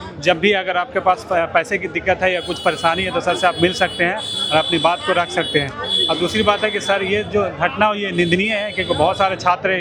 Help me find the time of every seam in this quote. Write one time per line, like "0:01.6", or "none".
none